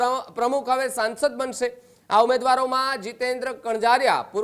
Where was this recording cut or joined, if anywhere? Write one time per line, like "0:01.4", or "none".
none